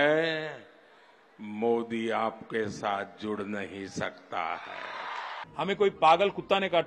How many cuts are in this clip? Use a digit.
1